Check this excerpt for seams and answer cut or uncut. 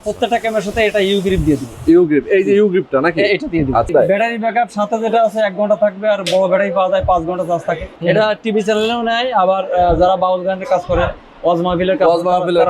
cut